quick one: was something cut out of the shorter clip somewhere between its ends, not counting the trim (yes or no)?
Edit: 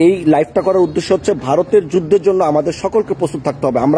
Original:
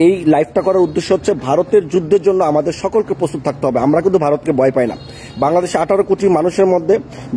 no